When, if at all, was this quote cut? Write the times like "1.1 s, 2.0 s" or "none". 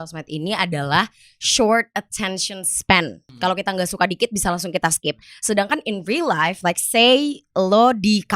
3.2 s